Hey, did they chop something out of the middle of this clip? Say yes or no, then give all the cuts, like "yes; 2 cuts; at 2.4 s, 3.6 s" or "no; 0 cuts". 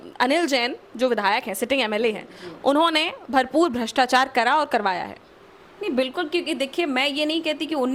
no; 0 cuts